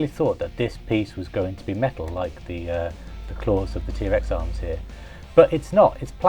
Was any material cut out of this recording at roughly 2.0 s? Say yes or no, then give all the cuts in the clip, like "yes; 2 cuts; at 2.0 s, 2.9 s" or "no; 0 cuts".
no; 0 cuts